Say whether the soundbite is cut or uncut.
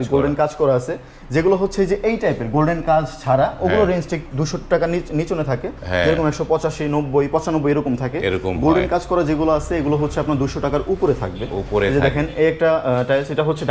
uncut